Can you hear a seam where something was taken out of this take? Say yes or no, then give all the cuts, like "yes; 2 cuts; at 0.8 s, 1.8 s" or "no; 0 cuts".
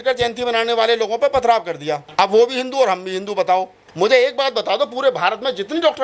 yes; 2 cuts; at 2.0 s, 3.8 s